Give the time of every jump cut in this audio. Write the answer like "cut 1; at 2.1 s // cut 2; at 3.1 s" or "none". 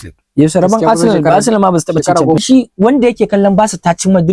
cut 1; at 2.4 s

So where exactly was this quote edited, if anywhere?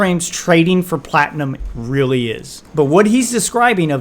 cut 1; at 2.5 s

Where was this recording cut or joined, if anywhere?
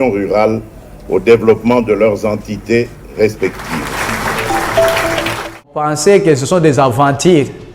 cut 1; at 5.8 s

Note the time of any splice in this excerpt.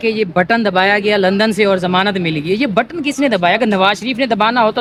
none

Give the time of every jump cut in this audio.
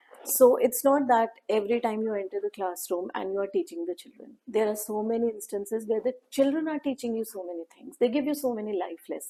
none

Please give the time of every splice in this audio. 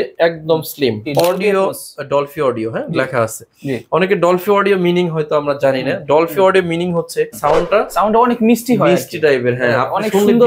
cut 1; at 1.0 s // cut 2; at 7.4 s

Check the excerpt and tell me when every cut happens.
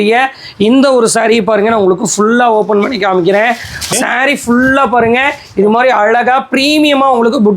cut 1; at 3.8 s

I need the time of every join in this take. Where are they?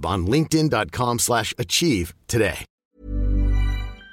cut 1; at 2.8 s

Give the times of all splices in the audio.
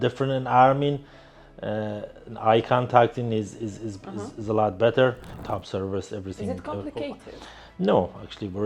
cut 1; at 5.3 s

